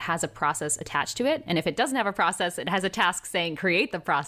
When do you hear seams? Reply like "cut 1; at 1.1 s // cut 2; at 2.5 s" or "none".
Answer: none